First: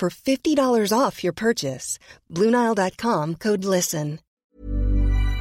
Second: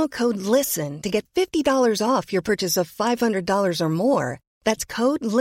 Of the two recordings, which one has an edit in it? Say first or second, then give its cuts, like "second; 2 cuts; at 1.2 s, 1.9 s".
first; 1 cut; at 4.4 s